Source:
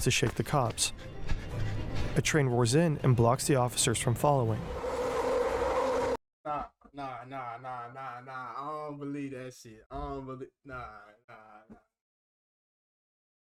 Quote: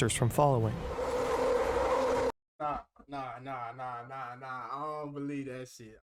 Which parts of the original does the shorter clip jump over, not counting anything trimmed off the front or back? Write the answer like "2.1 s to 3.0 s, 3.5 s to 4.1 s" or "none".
none